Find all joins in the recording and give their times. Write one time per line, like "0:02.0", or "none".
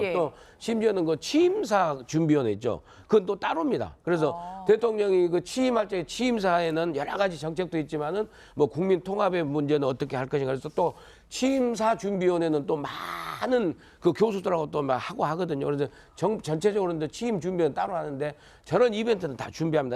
0:12.2